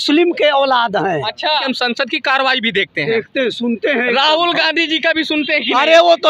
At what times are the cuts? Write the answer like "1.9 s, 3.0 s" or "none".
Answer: 1.6 s